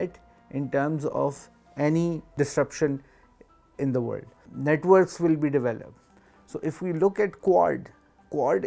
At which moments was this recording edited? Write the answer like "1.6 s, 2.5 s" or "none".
2.3 s, 4.5 s